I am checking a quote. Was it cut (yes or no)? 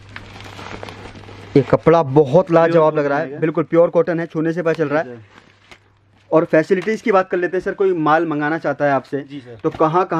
no